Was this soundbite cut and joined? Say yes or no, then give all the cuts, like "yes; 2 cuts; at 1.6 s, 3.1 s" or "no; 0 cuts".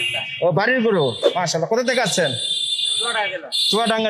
no; 0 cuts